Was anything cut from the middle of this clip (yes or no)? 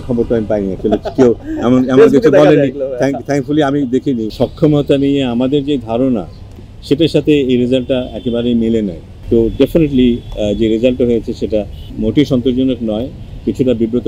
yes